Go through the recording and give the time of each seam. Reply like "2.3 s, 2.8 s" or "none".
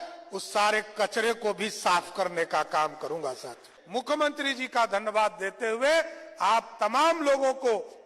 3.7 s